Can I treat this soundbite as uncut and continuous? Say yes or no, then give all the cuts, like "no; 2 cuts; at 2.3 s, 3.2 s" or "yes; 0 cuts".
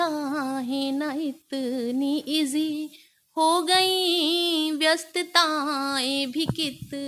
yes; 0 cuts